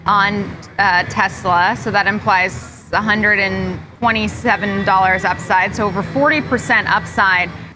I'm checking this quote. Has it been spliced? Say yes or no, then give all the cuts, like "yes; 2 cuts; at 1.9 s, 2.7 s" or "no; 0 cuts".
no; 0 cuts